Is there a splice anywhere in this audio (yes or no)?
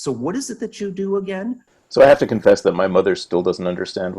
yes